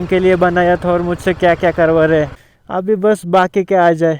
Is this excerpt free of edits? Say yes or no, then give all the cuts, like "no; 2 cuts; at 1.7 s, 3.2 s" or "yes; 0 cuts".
yes; 0 cuts